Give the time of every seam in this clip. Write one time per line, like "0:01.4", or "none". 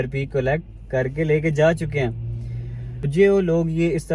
0:03.1